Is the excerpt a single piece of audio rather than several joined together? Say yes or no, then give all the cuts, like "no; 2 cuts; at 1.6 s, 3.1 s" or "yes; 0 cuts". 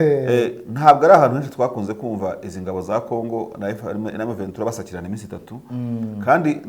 yes; 0 cuts